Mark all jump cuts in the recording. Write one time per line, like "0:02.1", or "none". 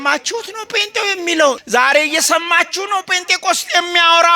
0:01.6